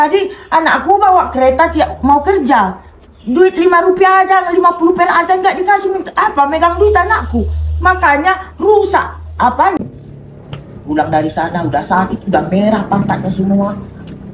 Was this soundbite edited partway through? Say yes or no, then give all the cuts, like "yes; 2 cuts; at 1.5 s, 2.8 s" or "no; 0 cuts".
yes; 1 cut; at 9.8 s